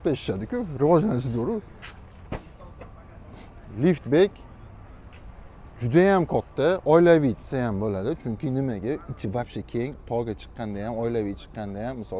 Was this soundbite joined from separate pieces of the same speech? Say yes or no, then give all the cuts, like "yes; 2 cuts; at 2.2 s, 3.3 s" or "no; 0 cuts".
no; 0 cuts